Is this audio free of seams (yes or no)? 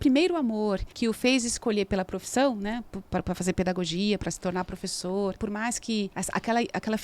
no